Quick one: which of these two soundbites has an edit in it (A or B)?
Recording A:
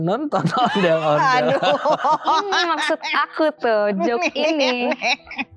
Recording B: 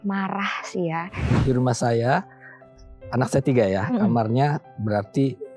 B